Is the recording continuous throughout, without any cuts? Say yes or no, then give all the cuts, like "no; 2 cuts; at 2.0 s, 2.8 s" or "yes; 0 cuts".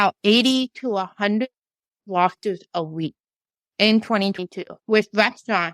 no; 1 cut; at 4.8 s